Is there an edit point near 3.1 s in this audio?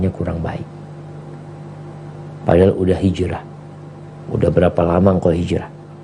no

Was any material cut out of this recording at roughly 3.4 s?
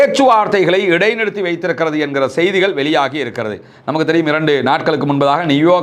no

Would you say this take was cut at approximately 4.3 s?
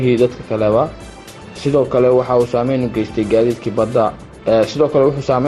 yes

